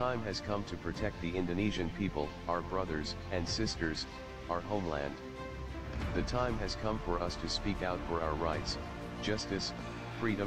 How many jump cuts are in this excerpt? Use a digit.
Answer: 0